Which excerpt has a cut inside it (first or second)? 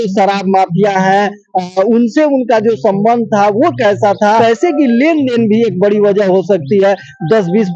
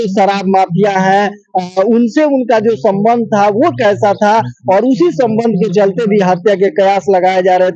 first